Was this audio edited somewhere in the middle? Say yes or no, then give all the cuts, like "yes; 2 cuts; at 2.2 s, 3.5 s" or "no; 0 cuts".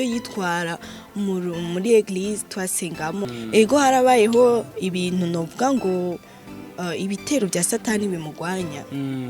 yes; 1 cut; at 3.2 s